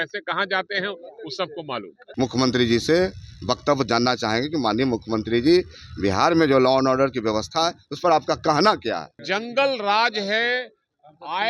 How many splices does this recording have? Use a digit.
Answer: 2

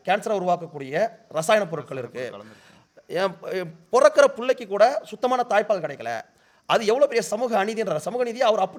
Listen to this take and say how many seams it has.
0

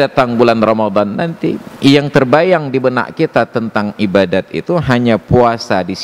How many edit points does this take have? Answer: 0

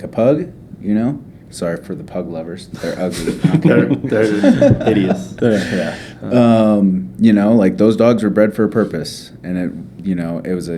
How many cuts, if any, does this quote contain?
0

